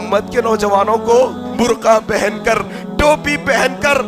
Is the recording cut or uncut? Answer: cut